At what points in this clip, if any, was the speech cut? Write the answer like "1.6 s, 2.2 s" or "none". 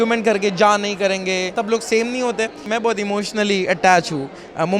1.5 s, 2.6 s

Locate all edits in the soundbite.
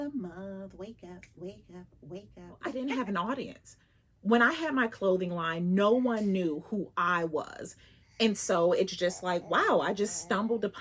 2.7 s

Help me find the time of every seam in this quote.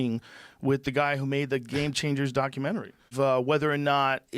3.1 s

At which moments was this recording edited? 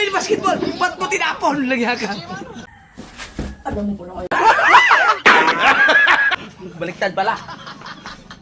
none

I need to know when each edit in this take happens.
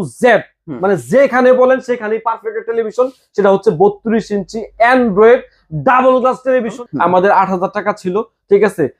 6.8 s

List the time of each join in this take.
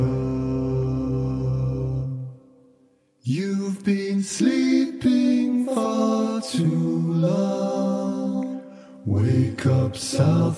1.2 s

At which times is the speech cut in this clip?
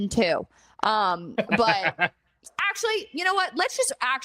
2.4 s

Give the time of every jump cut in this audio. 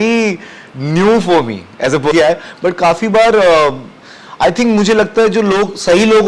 2.1 s

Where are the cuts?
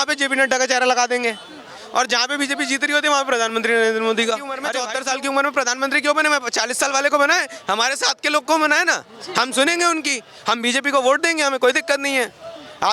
4.7 s

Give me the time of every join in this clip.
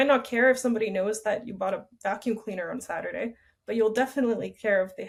none

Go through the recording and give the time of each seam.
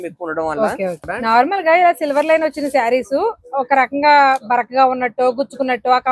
1.1 s

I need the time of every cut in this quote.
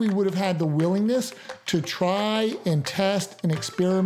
none

